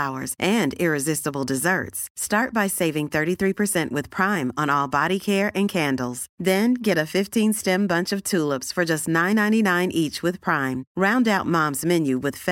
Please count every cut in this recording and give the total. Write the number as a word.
zero